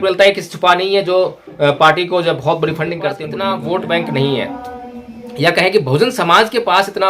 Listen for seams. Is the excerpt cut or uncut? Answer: cut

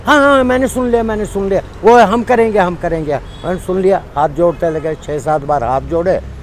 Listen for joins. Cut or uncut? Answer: uncut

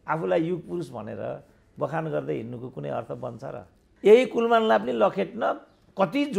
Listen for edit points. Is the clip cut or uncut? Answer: cut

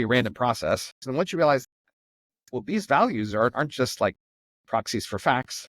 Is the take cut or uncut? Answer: cut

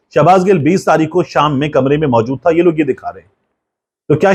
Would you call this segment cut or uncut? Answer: uncut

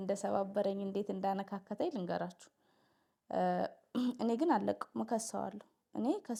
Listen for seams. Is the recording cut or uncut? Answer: uncut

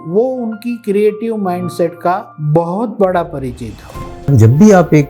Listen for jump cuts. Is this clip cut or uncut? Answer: cut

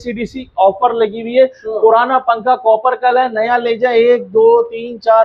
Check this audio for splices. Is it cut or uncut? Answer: uncut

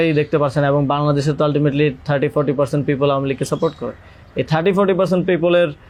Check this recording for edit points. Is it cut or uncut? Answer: uncut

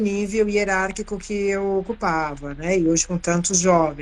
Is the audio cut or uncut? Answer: uncut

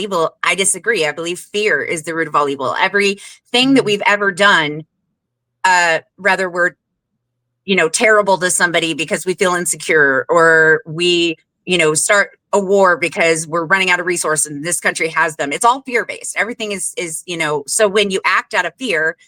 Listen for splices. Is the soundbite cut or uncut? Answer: uncut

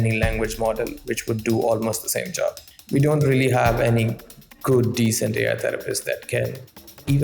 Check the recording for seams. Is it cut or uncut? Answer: cut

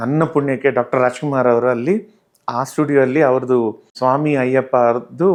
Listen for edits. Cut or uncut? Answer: uncut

